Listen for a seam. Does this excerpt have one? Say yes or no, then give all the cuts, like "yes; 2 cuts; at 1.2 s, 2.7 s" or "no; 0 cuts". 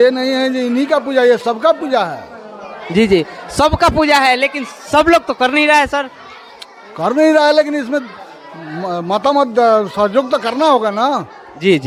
no; 0 cuts